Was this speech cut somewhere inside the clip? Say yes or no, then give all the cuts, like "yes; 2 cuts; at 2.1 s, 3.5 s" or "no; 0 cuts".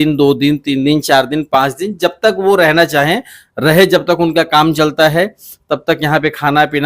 no; 0 cuts